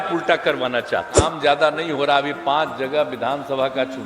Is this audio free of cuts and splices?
no; 1 cut; at 1.1 s

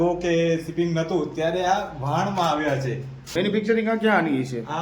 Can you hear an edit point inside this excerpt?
yes; 1 cut; at 3.4 s

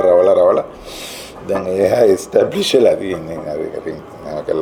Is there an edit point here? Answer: no; 0 cuts

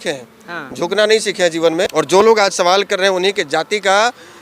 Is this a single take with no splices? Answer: no; 1 cut; at 1.9 s

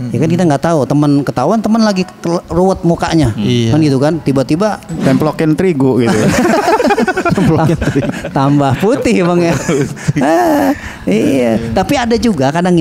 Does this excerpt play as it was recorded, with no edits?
yes; 0 cuts

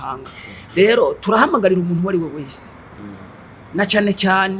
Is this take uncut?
yes; 0 cuts

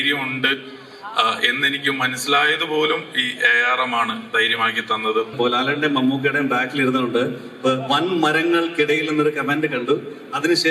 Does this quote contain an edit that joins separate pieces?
yes; 1 cut; at 5.3 s

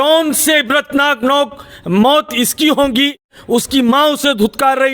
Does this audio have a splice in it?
yes; 1 cut; at 3.3 s

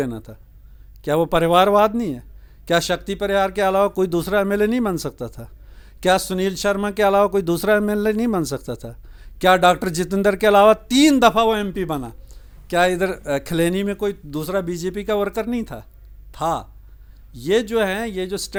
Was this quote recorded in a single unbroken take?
yes; 0 cuts

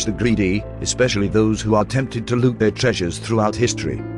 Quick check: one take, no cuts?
yes; 0 cuts

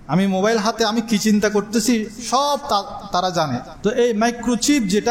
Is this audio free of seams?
no; 1 cut; at 3.7 s

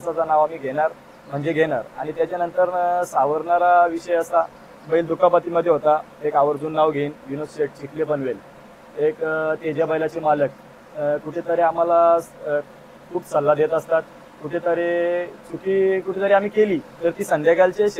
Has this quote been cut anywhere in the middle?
no; 0 cuts

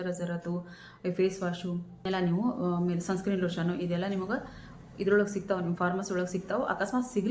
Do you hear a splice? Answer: yes; 1 cut; at 2.1 s

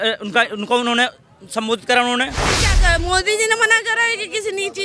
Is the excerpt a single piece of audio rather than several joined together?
no; 1 cut; at 2.7 s

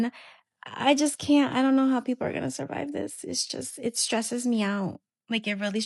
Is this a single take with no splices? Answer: yes; 0 cuts

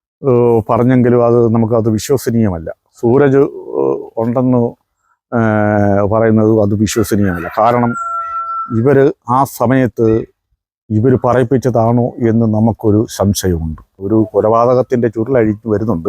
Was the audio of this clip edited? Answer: yes; 1 cut; at 14.0 s

